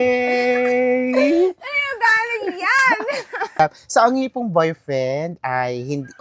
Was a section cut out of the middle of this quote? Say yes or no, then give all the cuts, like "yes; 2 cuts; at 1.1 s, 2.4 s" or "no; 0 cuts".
yes; 1 cut; at 3.6 s